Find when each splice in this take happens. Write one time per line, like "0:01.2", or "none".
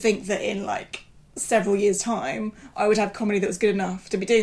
none